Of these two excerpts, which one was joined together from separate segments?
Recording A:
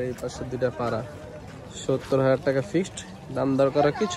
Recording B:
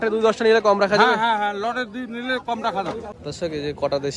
B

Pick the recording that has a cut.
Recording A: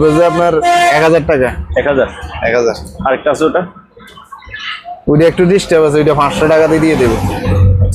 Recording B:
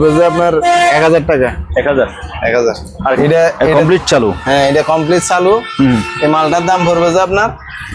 B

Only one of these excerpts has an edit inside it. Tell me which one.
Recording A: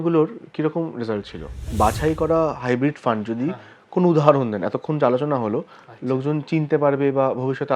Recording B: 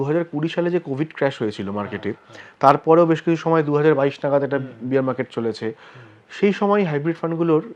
A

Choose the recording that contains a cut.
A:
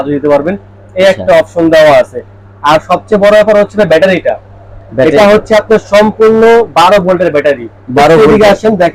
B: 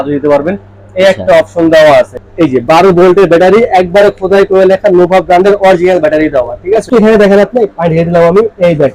B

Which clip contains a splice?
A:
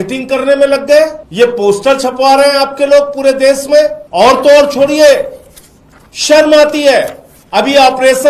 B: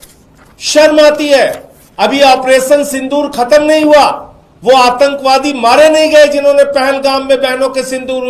A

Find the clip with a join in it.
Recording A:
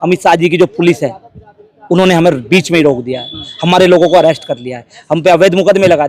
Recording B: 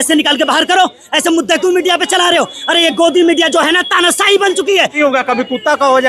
B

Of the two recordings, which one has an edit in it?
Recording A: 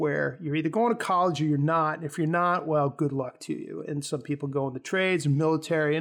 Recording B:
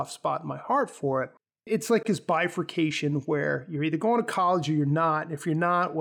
B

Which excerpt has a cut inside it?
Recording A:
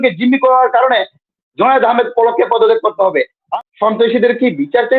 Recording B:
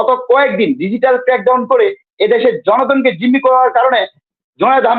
A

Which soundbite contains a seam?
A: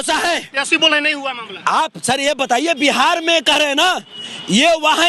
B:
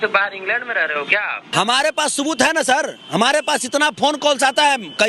B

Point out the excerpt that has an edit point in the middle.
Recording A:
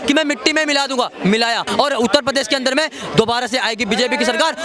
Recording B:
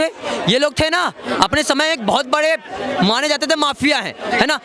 A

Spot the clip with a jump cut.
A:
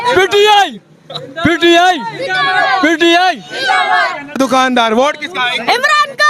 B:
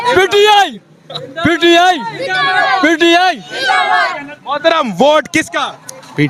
A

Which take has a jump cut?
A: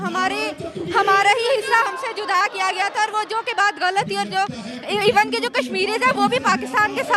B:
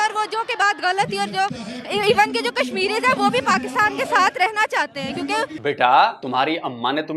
B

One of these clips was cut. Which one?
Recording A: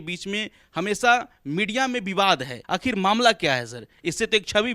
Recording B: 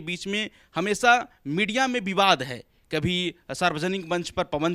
A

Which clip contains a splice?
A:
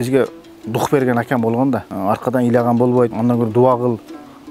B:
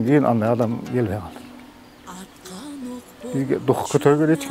A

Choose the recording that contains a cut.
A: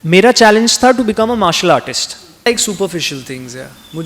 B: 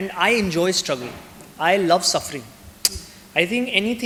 A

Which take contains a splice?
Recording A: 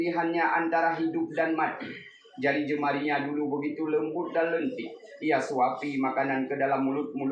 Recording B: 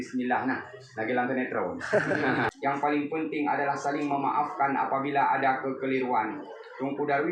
B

